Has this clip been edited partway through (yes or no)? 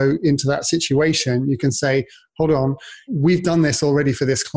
yes